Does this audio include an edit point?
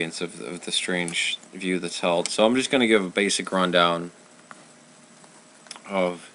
yes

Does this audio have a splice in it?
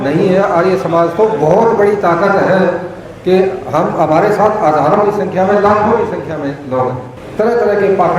yes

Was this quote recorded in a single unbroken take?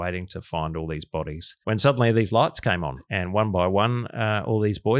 no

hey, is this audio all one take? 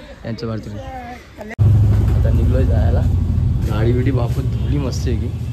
no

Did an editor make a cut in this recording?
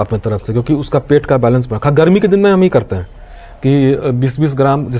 no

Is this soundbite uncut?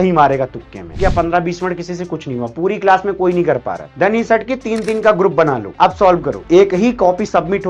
no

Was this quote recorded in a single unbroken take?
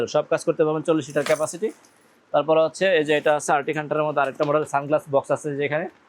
yes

